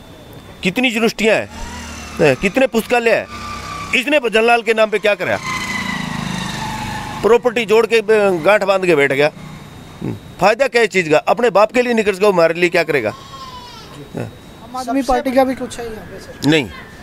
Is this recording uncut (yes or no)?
no